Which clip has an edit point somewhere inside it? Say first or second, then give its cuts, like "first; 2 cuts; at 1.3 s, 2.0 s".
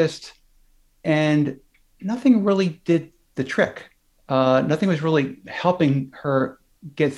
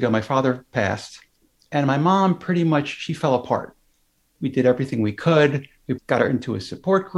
second; 2 cuts; at 4.3 s, 5.9 s